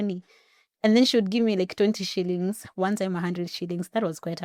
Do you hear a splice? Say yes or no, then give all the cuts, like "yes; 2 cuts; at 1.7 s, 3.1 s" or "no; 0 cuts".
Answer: no; 0 cuts